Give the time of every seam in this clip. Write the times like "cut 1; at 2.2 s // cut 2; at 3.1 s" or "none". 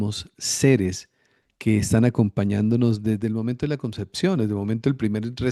none